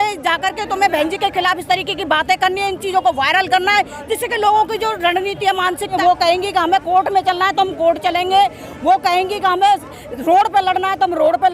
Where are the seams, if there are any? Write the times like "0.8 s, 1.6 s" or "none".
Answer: 5.9 s